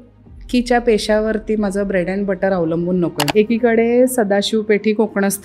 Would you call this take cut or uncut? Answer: cut